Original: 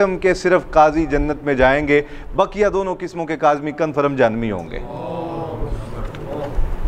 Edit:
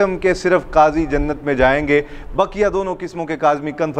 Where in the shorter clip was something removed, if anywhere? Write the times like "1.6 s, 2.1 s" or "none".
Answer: none